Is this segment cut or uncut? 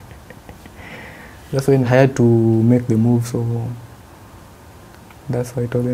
cut